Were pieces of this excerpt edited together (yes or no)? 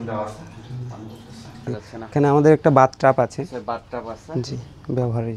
yes